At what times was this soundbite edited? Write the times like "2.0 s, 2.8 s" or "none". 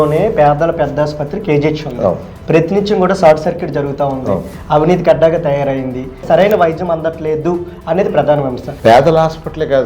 6.2 s, 8.7 s